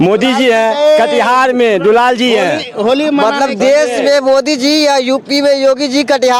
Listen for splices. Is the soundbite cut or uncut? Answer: uncut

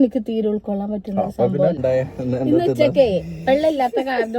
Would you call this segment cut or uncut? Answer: cut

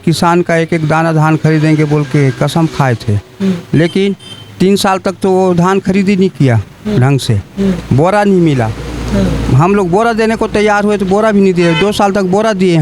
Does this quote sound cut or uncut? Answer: uncut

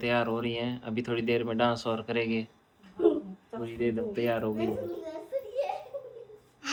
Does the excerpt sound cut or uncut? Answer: uncut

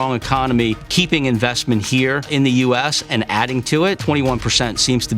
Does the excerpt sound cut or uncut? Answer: cut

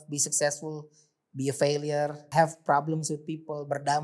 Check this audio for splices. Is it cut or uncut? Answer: cut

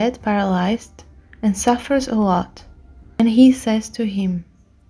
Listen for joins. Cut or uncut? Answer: cut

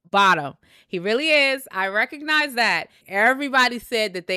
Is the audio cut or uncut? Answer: cut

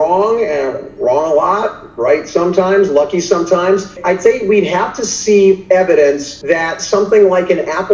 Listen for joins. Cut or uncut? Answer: cut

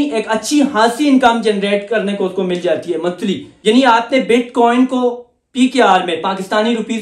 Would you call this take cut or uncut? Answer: cut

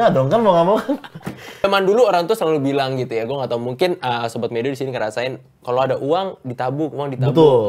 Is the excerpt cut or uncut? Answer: cut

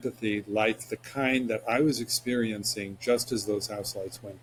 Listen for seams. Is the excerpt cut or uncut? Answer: uncut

